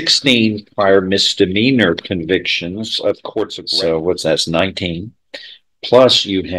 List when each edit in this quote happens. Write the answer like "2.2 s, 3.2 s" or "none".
3.6 s